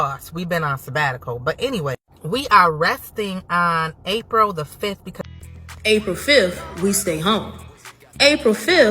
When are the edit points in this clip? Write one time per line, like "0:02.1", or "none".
0:05.2